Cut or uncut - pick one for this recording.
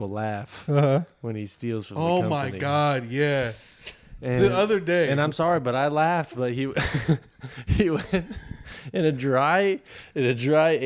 uncut